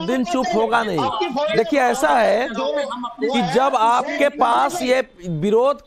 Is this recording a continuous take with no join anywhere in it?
yes; 0 cuts

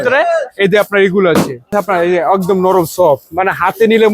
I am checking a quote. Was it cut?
yes; 1 cut; at 1.8 s

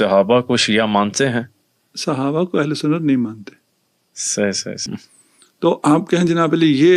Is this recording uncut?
no; 1 cut; at 4.8 s

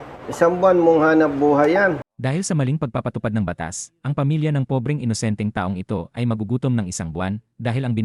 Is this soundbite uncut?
yes; 0 cuts

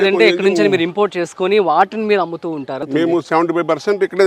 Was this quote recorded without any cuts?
no; 1 cut; at 2.8 s

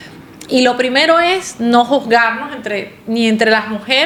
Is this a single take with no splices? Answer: yes; 0 cuts

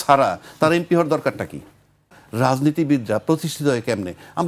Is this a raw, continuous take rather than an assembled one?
no; 1 cut; at 2.2 s

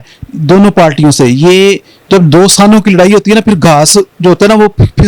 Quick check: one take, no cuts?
yes; 0 cuts

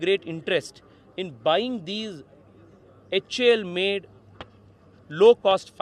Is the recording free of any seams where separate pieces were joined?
yes; 0 cuts

